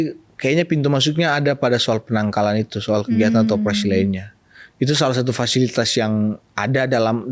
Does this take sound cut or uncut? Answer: uncut